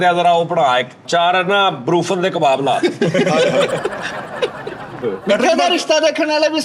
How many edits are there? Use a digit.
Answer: 2